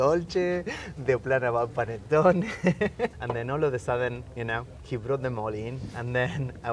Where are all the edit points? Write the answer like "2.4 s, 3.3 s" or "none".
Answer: 3.2 s, 4.7 s